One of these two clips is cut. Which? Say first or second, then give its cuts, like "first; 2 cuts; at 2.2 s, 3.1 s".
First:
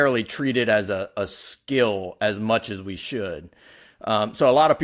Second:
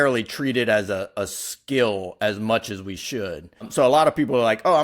second; 1 cut; at 3.7 s